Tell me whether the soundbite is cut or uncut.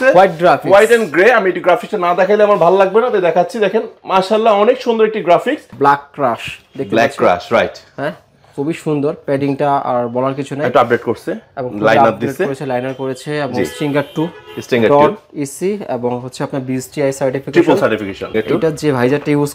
cut